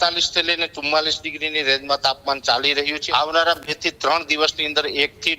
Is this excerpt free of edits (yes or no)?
no